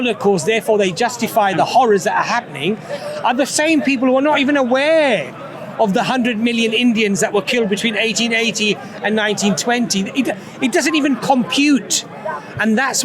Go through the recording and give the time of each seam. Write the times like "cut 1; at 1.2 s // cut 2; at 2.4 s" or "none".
none